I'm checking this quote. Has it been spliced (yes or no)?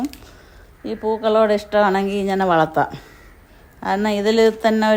no